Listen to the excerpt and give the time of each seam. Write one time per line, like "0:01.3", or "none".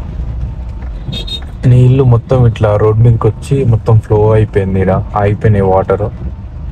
none